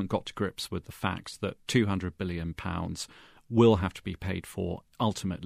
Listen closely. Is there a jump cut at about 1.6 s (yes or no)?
no